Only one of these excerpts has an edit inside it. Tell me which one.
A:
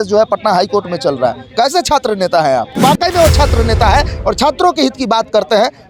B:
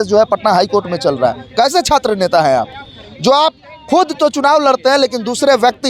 A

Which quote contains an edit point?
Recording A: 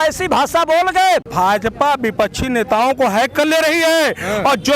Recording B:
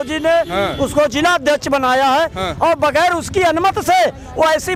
A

